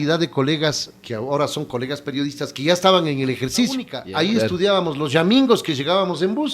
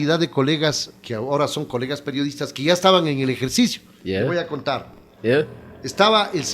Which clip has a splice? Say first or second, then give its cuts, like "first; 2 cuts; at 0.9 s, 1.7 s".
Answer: first; 1 cut; at 4.0 s